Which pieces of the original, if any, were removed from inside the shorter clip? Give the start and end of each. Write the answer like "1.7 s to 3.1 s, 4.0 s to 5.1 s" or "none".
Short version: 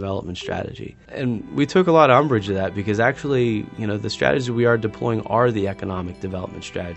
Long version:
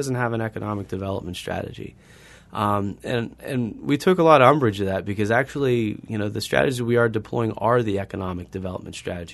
2.0 s to 3.4 s